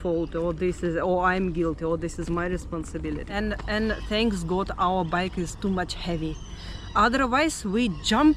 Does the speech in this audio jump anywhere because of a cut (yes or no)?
yes